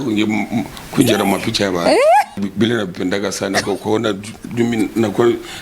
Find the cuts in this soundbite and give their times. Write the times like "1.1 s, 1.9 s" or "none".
2.4 s